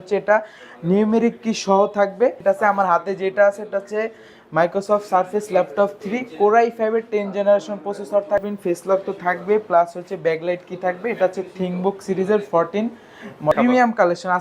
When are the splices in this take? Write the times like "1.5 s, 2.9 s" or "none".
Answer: 2.4 s, 8.5 s, 13.5 s